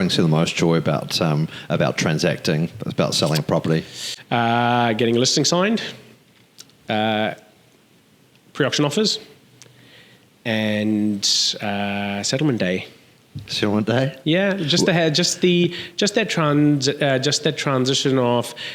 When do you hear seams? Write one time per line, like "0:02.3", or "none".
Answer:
none